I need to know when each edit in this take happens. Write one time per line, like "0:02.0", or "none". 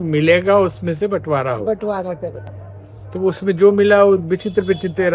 none